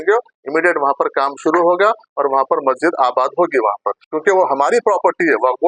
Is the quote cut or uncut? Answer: cut